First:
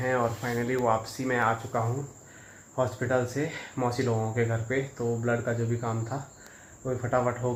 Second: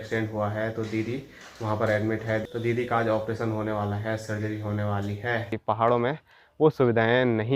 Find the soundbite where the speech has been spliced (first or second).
second